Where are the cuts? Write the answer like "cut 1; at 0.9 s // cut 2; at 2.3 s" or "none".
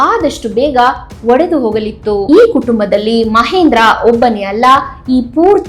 cut 1; at 2.2 s